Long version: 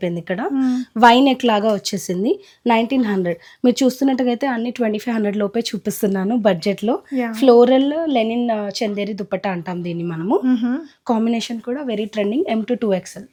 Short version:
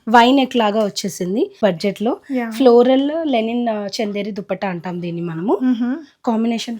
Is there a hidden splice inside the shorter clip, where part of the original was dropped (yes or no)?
yes